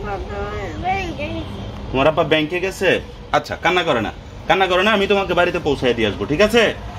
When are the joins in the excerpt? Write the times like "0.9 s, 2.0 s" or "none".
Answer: none